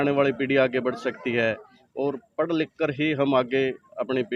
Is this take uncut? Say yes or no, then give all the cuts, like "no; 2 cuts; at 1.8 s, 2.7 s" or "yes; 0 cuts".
yes; 0 cuts